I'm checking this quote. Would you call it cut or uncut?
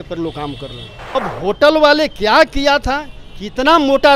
cut